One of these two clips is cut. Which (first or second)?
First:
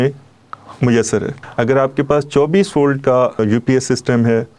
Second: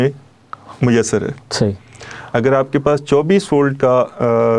first